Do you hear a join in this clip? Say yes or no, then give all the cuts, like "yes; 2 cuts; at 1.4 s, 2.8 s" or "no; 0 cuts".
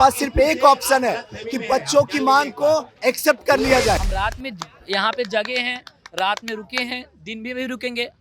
yes; 1 cut; at 4.1 s